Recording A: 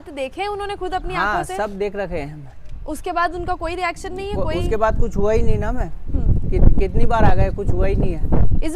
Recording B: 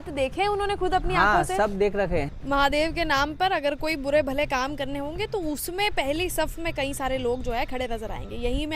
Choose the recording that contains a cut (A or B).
B